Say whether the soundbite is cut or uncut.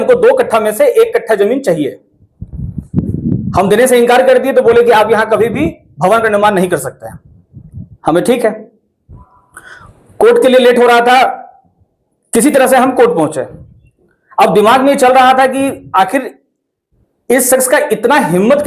uncut